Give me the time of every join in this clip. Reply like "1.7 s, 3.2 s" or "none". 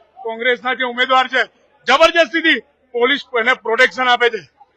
none